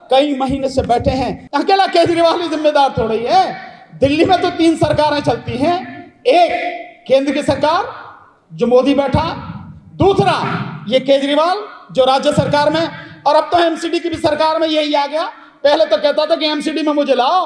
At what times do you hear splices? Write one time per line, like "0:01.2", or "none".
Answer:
0:01.4